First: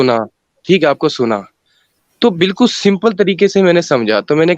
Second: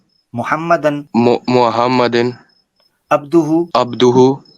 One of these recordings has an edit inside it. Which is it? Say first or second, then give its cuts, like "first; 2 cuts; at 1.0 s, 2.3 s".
second; 2 cuts; at 1.0 s, 3.7 s